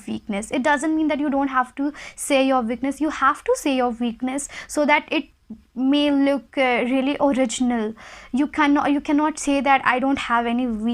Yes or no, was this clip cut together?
no